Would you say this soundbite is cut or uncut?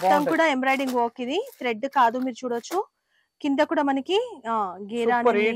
uncut